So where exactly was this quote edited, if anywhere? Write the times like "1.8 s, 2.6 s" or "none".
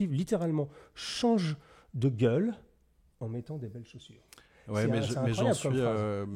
none